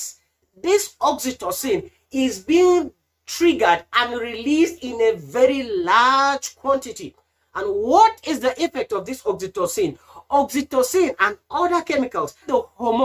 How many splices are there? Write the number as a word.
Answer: zero